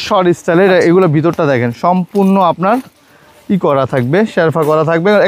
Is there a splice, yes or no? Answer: no